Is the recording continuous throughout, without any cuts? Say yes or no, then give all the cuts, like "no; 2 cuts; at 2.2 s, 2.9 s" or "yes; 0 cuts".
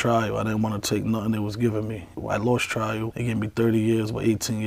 yes; 0 cuts